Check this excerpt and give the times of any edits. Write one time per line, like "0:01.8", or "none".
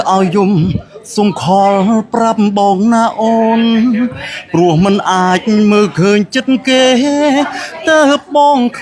none

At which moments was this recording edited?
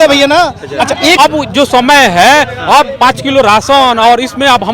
0:01.2

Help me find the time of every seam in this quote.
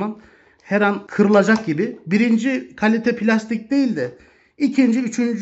0:01.0

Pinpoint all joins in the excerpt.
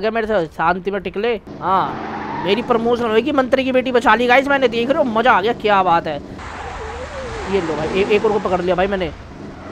0:01.5
0:06.5

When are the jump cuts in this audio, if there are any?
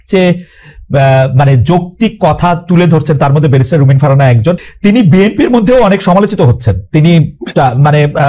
0:04.6

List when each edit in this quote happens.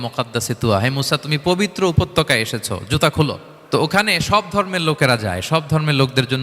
0:03.5

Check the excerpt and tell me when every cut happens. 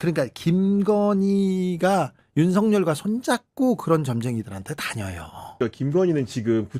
0:05.5

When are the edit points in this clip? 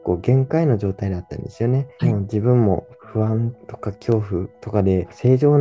none

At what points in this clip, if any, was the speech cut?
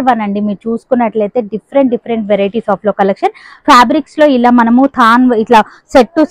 none

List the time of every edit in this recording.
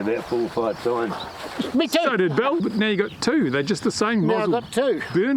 0:02.6

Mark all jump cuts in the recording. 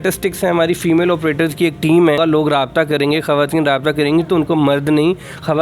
0:02.2

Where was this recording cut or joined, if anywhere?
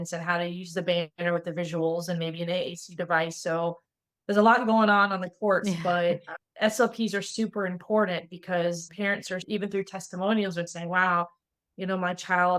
none

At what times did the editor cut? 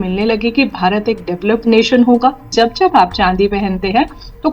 0:02.5

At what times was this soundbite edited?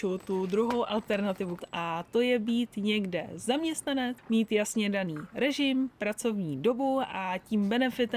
0:01.6
0:04.2

